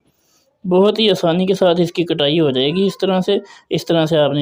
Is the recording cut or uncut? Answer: uncut